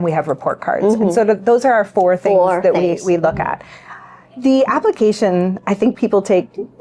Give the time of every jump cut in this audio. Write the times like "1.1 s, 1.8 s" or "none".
none